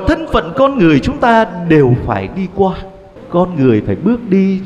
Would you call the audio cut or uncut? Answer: cut